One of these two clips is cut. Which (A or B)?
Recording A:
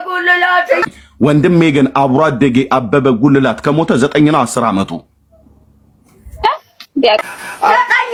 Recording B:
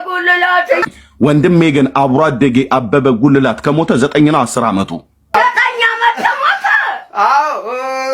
B